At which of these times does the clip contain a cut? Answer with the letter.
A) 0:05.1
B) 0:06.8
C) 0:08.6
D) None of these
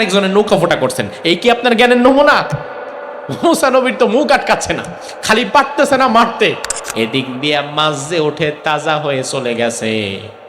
B